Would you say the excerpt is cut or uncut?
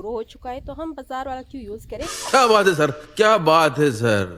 uncut